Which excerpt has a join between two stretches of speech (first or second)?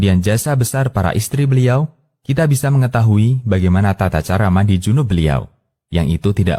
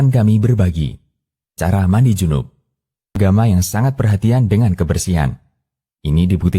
second